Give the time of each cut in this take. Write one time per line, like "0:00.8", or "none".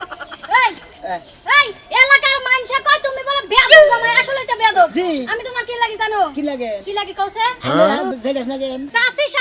none